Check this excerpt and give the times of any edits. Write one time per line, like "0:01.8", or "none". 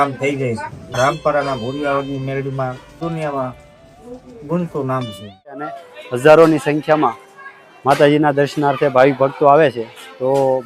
0:01.0
0:03.0
0:05.7